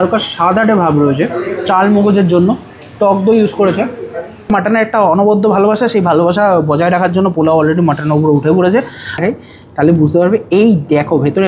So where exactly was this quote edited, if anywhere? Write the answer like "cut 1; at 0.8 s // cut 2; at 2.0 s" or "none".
cut 1; at 4.5 s // cut 2; at 9.2 s